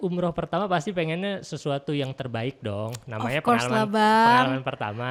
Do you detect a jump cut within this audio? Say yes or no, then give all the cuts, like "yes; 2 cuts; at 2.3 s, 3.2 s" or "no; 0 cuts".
no; 0 cuts